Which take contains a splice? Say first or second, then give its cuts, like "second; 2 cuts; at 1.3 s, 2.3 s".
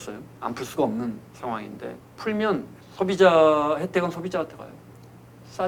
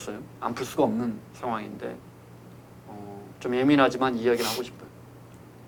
first; 2 cuts; at 2.1 s, 2.8 s